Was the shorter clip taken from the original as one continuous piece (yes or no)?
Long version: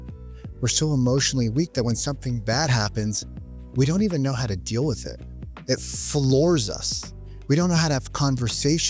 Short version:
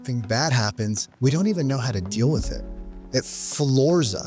no